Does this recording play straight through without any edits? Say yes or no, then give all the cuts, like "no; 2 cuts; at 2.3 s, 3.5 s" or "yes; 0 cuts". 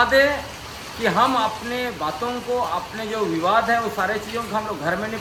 yes; 0 cuts